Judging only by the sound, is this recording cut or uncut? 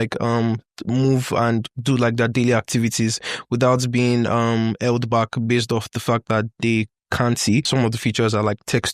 cut